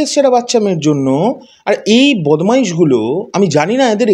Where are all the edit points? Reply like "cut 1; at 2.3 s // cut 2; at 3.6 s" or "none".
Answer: none